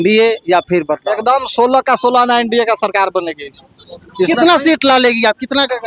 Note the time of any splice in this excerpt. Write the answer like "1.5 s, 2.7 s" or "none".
none

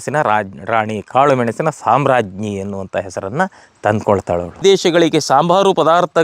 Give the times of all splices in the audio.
4.6 s

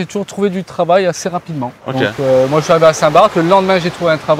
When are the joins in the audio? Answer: none

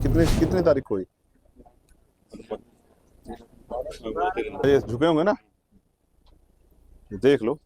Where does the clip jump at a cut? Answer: 4.6 s

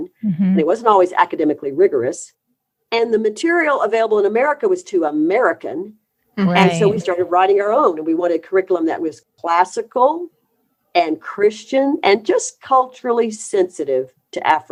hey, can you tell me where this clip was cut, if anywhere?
none

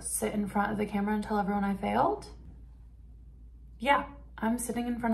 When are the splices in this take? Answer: 2.4 s

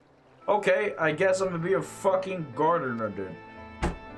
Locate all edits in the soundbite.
none

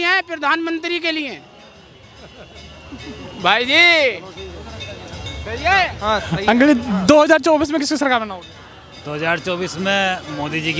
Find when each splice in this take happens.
none

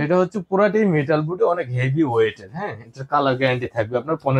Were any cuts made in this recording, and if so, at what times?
none

